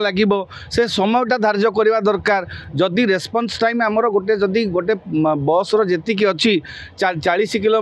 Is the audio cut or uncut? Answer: uncut